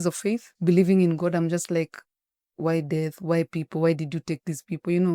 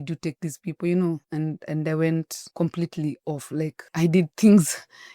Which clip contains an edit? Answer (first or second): second